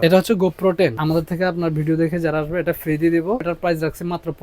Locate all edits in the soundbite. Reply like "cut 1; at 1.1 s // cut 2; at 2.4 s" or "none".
cut 1; at 1.0 s // cut 2; at 3.4 s